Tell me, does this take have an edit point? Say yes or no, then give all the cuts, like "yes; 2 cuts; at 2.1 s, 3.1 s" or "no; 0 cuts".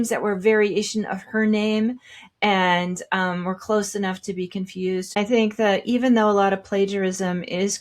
yes; 1 cut; at 5.2 s